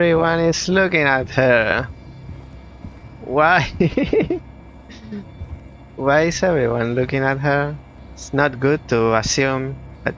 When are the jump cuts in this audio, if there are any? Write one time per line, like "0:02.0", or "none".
none

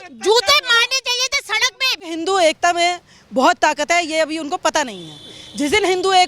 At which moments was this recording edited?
0:02.1

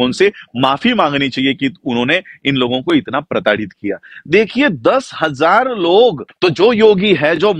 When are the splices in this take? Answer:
0:06.3

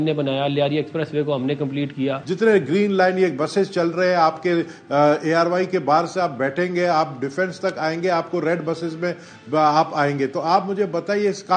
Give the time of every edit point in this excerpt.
0:02.2

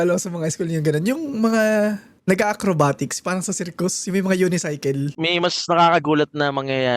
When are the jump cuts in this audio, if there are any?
0:05.1

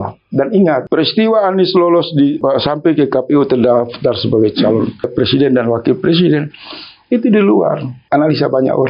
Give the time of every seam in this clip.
0:00.8
0:02.4
0:05.1
0:07.9

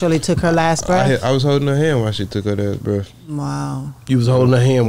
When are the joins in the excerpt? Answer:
none

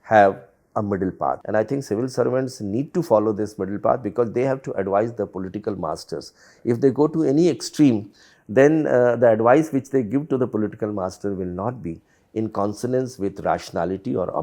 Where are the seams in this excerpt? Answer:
0:01.4

